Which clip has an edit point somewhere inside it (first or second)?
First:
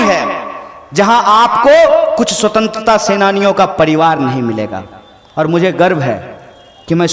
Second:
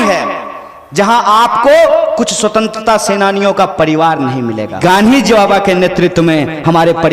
second